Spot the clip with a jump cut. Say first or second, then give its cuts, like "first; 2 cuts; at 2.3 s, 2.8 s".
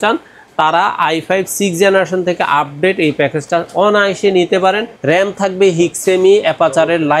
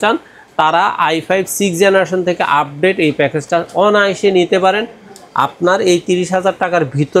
first; 1 cut; at 4.9 s